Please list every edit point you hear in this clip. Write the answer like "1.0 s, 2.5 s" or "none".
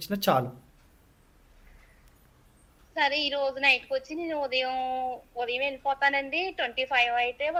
none